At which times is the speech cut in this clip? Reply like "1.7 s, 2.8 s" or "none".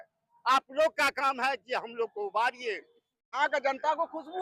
3.4 s